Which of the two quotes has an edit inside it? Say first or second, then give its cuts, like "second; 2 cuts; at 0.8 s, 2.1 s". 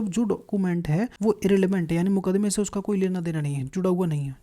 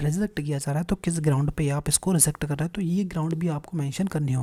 first; 1 cut; at 1.1 s